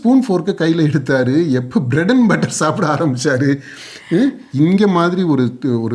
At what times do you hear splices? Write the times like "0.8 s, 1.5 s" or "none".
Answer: 4.4 s